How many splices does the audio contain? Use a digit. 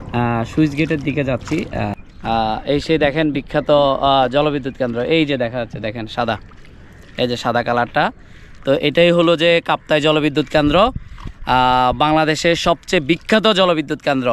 1